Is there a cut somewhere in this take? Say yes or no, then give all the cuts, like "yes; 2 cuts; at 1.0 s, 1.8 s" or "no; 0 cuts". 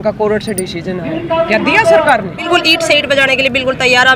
yes; 1 cut; at 2.4 s